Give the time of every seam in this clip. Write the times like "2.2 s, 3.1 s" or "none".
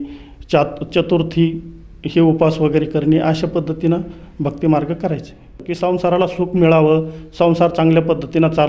5.6 s